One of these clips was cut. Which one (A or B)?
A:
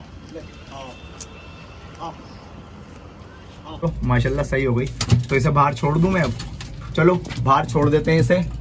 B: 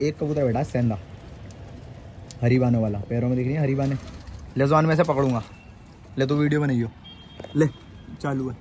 A